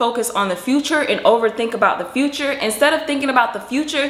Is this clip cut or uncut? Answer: uncut